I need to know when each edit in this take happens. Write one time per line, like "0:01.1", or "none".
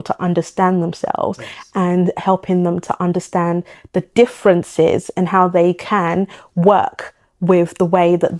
none